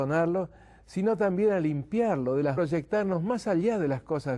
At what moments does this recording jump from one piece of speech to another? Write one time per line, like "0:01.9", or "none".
none